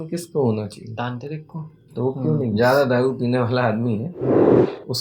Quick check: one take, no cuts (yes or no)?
no